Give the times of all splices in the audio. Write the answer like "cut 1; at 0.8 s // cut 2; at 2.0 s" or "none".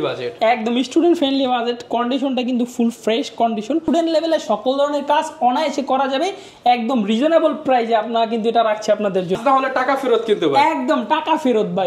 cut 1; at 3.9 s // cut 2; at 9.4 s